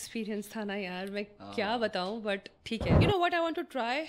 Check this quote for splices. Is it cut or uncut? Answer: cut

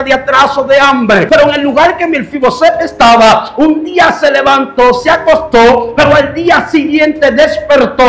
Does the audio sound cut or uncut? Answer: cut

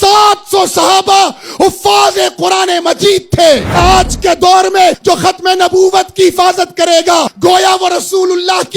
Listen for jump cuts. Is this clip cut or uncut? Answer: cut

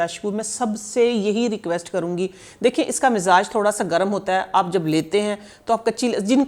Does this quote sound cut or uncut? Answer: uncut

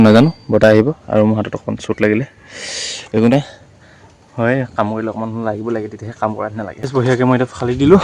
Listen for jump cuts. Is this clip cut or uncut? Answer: cut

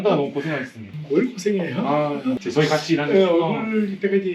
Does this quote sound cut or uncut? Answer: uncut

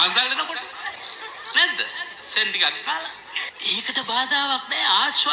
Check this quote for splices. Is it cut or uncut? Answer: cut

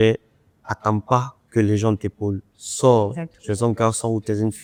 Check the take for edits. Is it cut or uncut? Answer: uncut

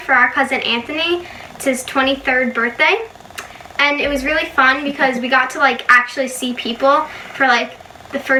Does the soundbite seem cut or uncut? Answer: uncut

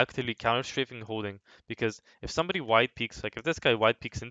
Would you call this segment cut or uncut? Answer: uncut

